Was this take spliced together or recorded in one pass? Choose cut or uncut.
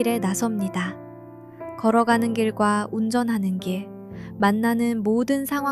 uncut